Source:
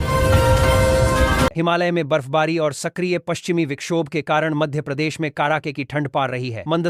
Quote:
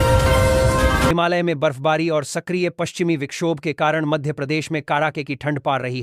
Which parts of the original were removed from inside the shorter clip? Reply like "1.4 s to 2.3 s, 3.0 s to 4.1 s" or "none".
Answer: 1.5 s to 1.6 s